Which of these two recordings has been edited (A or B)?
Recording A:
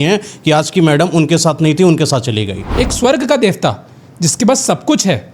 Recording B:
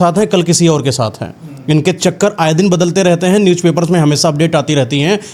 A